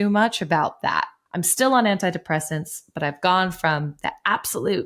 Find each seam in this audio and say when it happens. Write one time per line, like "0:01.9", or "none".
0:01.2